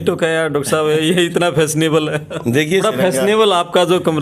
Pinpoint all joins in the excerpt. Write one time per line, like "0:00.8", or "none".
0:02.8